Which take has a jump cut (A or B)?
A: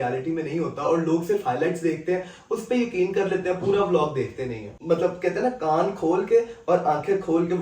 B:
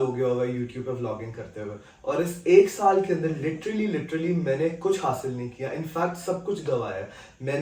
A